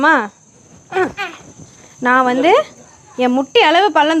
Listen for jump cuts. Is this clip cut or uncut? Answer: uncut